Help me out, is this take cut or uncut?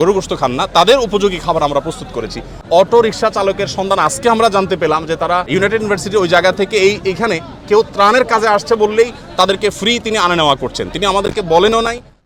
cut